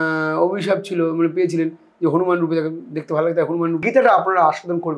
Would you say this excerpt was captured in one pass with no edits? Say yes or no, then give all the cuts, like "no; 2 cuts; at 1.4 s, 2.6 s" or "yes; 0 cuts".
no; 1 cut; at 3.8 s